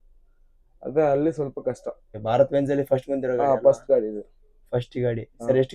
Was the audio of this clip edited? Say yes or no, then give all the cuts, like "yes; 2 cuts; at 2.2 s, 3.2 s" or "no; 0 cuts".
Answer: yes; 1 cut; at 2.1 s